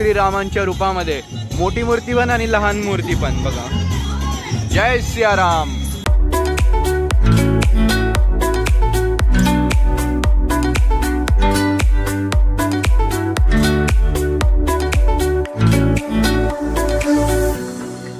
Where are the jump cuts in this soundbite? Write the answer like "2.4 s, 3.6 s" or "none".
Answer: none